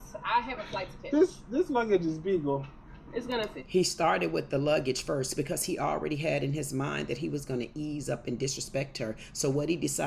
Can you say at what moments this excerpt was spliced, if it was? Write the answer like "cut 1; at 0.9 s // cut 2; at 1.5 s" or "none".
none